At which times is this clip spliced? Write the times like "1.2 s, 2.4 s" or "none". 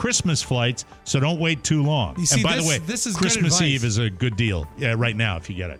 none